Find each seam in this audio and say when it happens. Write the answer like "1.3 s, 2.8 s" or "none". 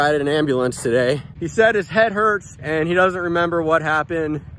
1.4 s